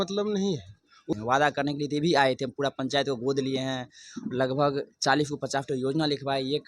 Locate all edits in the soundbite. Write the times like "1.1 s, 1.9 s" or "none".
1.0 s

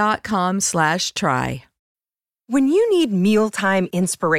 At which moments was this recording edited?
1.7 s

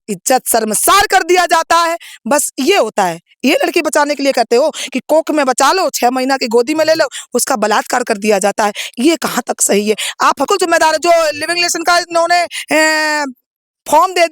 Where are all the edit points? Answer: 10.5 s

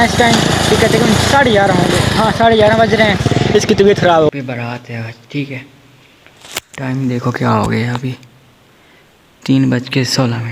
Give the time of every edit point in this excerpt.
4.3 s

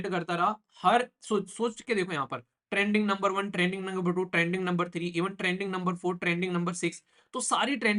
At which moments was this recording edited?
none

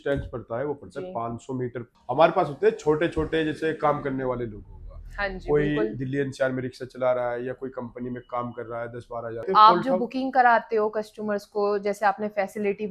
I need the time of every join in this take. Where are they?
1.9 s, 9.5 s

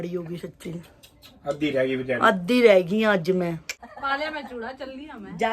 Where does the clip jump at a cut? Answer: 3.8 s

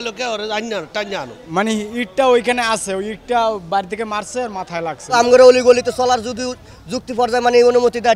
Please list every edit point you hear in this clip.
1.4 s, 5.1 s

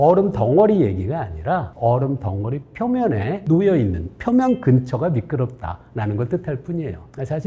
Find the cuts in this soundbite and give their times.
none

